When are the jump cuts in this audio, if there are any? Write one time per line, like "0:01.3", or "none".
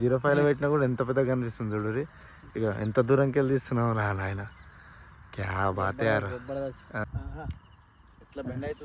0:07.0